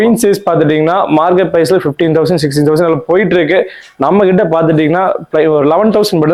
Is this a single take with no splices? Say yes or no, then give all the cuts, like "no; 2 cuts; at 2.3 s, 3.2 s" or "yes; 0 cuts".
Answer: yes; 0 cuts